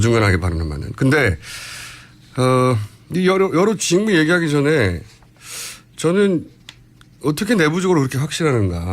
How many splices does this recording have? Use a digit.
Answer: 1